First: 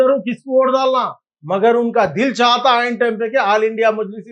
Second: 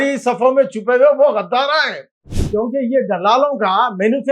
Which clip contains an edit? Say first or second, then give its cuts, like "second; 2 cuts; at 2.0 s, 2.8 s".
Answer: second; 1 cut; at 2.3 s